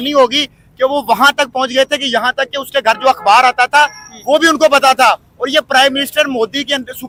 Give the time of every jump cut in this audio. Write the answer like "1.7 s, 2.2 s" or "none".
none